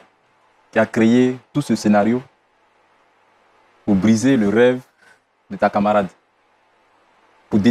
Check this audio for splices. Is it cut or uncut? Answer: uncut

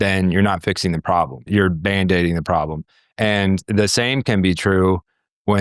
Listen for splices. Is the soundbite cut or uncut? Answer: uncut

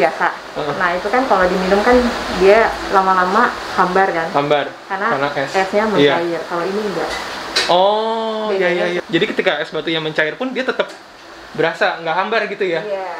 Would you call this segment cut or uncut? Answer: cut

